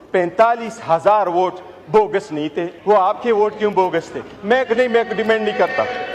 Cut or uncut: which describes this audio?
cut